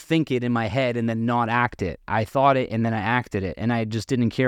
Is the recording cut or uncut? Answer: uncut